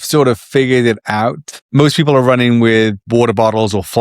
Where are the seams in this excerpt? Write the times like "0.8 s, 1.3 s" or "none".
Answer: 1.6 s, 3.0 s